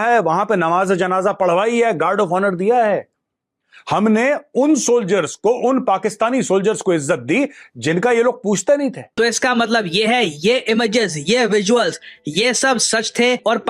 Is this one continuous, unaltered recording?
no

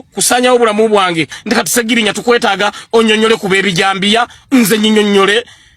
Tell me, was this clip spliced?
yes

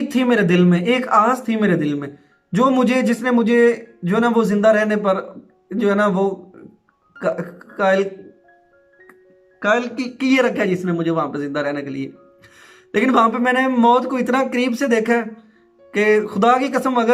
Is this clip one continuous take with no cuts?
yes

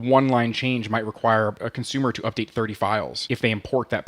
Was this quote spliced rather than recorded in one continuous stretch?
yes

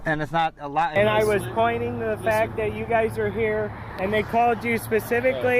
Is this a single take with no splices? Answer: no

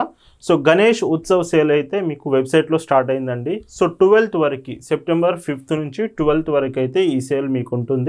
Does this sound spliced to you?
no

